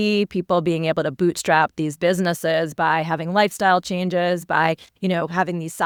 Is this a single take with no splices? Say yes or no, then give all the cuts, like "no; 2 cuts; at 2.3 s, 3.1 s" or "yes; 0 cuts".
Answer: yes; 0 cuts